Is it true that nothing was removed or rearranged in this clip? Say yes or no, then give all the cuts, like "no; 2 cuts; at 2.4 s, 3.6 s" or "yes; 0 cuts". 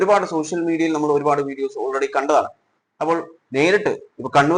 yes; 0 cuts